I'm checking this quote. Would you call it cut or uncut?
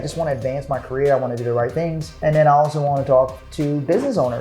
cut